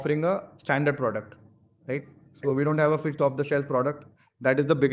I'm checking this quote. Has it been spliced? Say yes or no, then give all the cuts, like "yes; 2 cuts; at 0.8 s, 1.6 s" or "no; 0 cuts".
no; 0 cuts